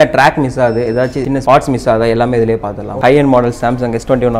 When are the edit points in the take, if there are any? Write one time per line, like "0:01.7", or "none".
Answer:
0:02.8